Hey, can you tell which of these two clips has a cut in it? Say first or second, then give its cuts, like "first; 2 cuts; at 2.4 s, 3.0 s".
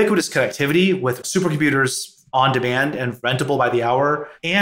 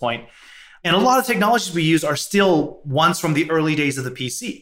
first; 1 cut; at 1.3 s